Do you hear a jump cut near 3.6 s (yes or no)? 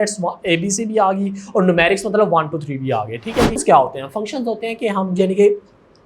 yes